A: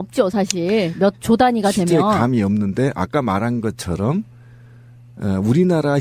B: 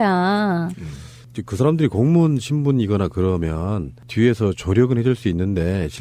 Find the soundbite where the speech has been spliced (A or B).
A